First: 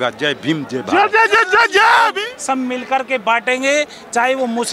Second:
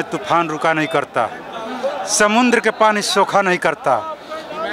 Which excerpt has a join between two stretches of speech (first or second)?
first